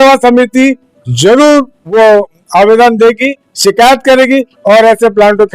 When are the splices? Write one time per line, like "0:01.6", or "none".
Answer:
0:01.9